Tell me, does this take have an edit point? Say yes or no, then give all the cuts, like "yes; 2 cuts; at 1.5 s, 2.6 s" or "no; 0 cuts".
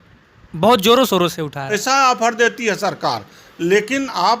yes; 1 cut; at 1.8 s